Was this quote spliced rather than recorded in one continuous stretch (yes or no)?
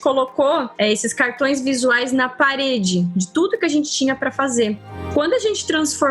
yes